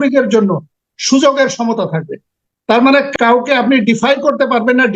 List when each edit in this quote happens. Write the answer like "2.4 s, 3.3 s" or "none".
3.1 s